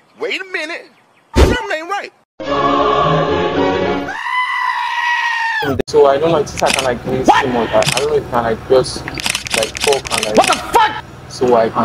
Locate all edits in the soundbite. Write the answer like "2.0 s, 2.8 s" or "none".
5.8 s